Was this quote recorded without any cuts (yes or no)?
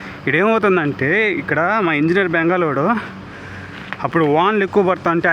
yes